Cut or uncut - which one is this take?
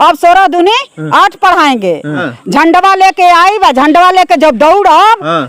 cut